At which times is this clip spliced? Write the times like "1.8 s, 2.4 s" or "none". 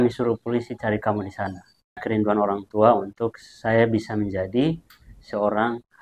2.1 s